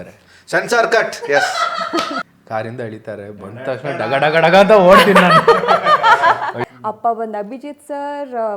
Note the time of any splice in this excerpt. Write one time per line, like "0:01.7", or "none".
0:02.2
0:06.6